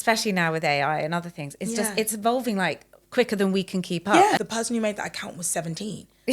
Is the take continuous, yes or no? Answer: no